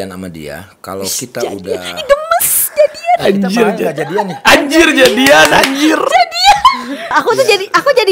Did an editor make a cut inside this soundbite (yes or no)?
yes